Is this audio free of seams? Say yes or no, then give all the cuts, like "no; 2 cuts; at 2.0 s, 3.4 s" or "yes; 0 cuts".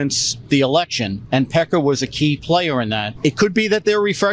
no; 1 cut; at 3.1 s